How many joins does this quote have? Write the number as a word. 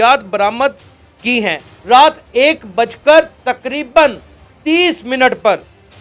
one